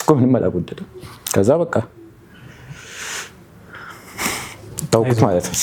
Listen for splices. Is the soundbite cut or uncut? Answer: uncut